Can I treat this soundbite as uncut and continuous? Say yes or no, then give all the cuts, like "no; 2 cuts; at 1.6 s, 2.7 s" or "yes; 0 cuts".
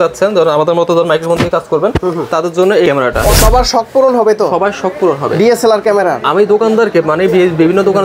no; 1 cut; at 3.3 s